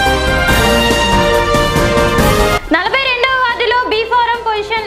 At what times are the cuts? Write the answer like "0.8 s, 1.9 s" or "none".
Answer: none